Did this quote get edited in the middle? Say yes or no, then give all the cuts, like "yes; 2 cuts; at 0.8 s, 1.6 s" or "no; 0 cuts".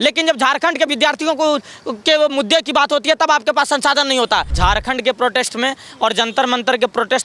yes; 1 cut; at 4.5 s